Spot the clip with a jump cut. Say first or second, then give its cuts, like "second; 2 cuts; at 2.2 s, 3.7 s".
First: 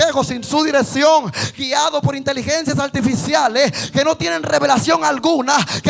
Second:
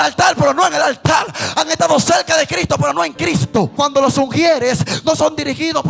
second; 1 cut; at 3.7 s